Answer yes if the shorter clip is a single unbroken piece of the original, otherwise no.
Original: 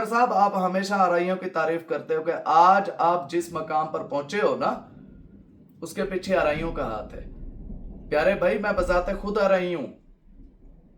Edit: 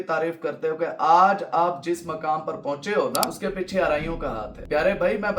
no